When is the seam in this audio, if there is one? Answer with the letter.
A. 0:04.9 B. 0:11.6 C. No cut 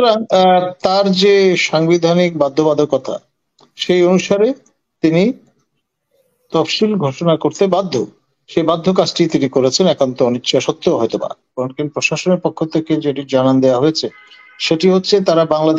B